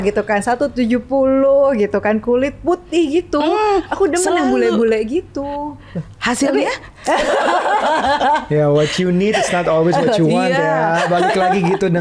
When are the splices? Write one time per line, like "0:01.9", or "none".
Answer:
none